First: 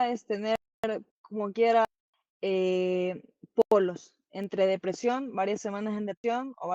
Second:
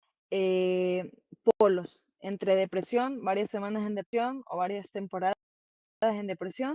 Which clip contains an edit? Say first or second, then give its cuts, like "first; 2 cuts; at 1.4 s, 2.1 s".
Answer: first; 1 cut; at 1.2 s